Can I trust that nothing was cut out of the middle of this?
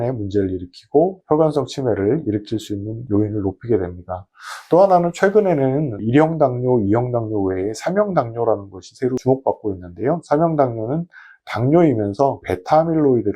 no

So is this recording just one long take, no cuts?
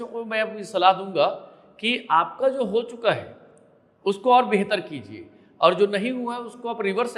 yes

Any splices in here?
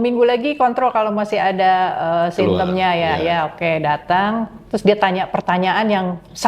no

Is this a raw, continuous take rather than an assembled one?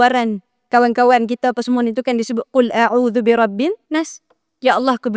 no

